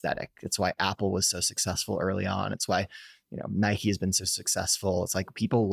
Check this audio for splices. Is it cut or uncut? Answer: uncut